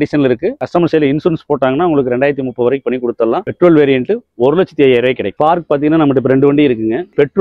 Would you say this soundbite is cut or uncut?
uncut